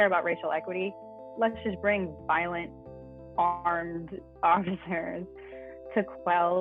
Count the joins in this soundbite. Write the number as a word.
zero